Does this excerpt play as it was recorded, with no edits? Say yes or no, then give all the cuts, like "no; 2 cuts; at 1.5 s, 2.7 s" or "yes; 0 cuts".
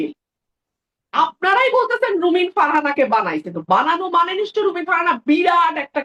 yes; 0 cuts